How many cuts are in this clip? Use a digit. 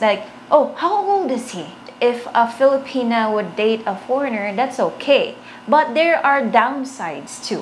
1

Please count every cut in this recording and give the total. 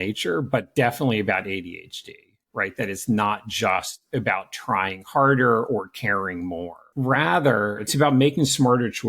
2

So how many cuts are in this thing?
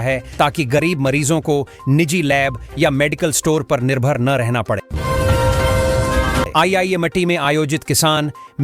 2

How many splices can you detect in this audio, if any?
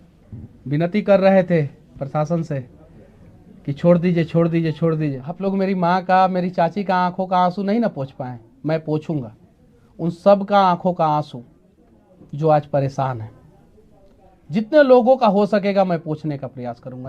1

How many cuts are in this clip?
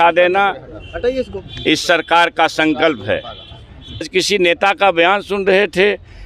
1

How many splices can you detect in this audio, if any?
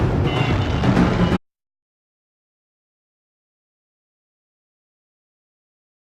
0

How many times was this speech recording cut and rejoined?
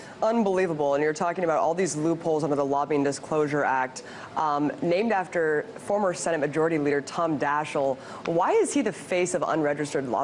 1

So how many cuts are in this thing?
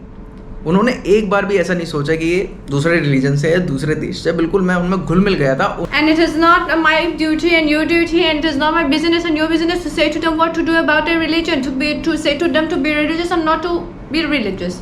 1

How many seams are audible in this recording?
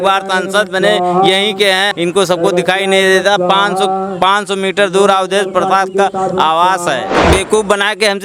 2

